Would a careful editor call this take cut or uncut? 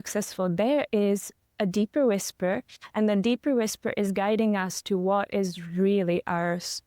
uncut